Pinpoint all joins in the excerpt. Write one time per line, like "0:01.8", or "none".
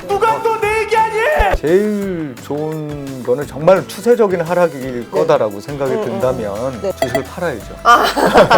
0:01.5
0:07.0